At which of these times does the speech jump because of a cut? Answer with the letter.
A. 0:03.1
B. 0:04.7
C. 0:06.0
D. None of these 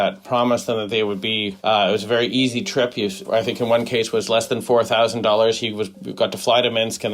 A